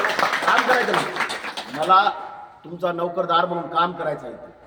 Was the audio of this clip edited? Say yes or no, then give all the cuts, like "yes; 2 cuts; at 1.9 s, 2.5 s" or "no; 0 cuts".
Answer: no; 0 cuts